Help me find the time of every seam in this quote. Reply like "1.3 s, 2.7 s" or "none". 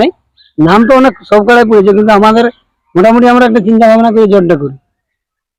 none